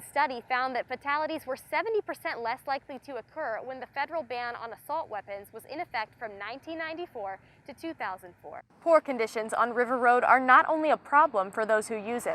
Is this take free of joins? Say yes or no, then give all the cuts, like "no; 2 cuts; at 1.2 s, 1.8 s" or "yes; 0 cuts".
no; 1 cut; at 8.6 s